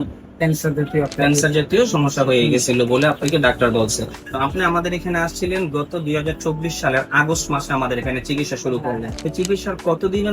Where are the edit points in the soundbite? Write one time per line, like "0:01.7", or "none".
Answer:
0:04.2
0:09.1